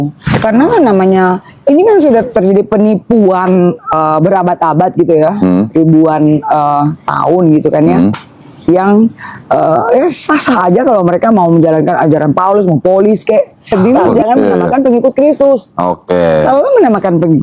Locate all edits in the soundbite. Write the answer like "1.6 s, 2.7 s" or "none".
3.9 s, 13.7 s